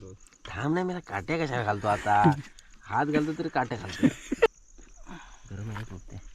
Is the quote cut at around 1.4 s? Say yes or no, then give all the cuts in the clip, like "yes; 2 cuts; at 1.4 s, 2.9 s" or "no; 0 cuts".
no; 1 cut; at 4.5 s